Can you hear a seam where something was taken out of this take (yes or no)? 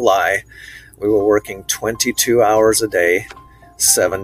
no